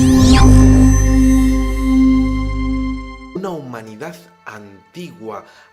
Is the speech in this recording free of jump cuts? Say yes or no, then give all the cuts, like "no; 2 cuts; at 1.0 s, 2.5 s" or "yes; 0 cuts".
yes; 0 cuts